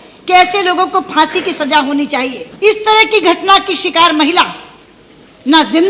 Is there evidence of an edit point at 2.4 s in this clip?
yes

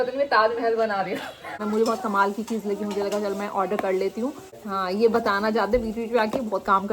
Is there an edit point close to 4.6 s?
yes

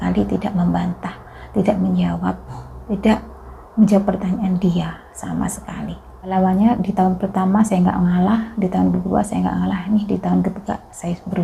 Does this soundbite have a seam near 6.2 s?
yes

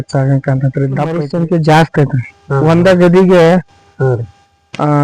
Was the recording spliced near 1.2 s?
yes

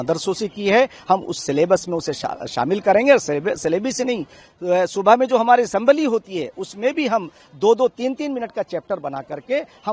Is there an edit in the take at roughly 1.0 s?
no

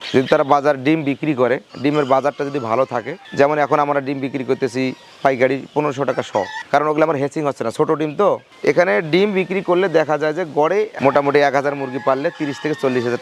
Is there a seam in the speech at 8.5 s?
yes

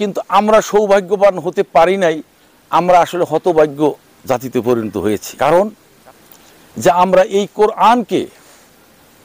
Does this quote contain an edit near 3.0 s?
no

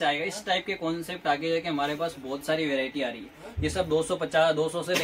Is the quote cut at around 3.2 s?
no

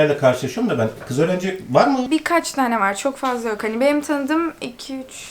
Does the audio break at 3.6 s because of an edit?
no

